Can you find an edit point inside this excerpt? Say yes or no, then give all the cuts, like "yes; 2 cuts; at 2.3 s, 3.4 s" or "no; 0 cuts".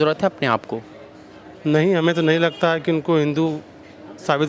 no; 0 cuts